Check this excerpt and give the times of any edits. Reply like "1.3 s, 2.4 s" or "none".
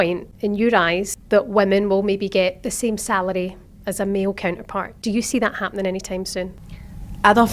1.1 s, 4.8 s, 6.8 s